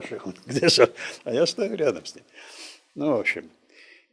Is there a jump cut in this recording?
no; 0 cuts

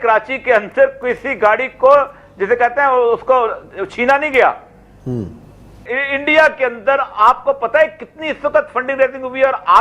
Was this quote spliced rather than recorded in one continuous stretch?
yes; 1 cut; at 5.9 s

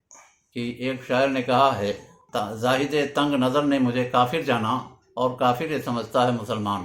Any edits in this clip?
yes; 1 cut; at 2.1 s

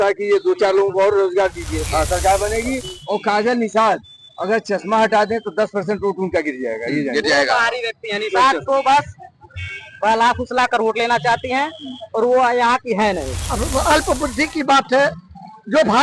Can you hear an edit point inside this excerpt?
yes; 2 cuts; at 1.8 s, 13.4 s

